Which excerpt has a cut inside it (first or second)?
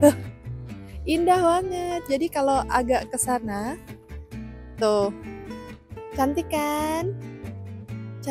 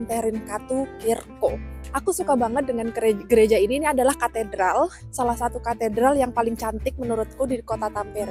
second